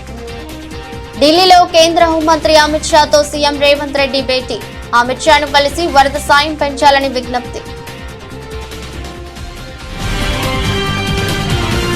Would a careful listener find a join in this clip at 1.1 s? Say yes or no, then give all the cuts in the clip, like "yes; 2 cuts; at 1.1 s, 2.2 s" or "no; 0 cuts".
no; 1 cut; at 8.5 s